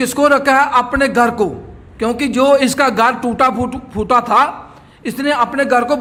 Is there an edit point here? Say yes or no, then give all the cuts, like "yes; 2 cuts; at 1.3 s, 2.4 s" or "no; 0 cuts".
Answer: no; 0 cuts